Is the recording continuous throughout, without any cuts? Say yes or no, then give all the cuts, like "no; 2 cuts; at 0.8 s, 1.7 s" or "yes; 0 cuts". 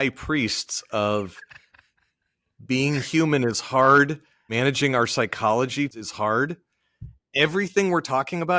no; 2 cuts; at 4.5 s, 5.9 s